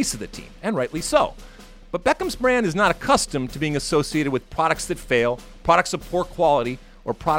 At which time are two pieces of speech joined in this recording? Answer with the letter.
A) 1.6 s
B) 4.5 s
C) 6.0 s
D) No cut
D